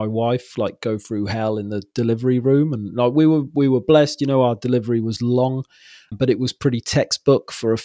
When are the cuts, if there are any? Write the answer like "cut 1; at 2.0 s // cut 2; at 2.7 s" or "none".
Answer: cut 1; at 6.1 s